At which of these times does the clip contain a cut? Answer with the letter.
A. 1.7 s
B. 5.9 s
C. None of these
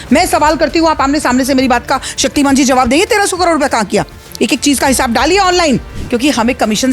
B